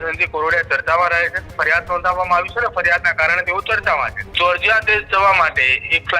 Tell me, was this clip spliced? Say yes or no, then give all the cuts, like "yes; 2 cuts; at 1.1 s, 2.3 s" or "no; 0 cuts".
yes; 2 cuts; at 1.5 s, 4.2 s